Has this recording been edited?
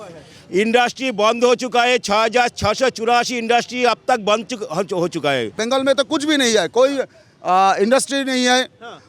yes; 1 cut; at 5.6 s

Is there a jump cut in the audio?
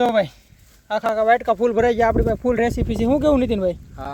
no; 0 cuts

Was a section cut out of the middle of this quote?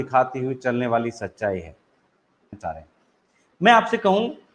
yes; 1 cut; at 2.6 s

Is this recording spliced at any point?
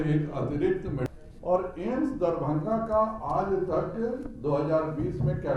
yes; 1 cut; at 1.1 s

